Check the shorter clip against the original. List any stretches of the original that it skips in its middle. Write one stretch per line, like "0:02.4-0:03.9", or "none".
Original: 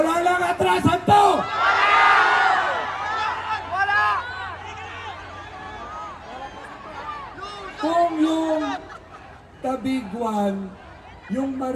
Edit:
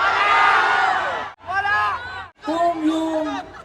0:03.0-0:03.6
0:04.5-0:07.7